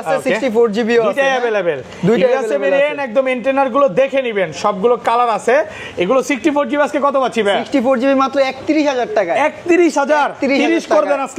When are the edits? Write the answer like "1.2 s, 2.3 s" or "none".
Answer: none